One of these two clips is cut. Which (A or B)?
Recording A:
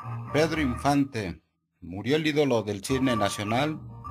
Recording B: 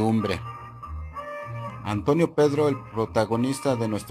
B